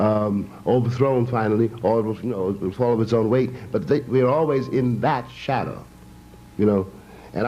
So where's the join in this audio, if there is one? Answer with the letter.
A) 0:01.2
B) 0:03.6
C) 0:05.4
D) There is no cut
B